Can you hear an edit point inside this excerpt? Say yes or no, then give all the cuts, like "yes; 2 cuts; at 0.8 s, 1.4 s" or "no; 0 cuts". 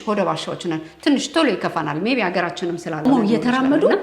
yes; 1 cut; at 3.1 s